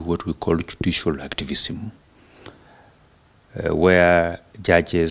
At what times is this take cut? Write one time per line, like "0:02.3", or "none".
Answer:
none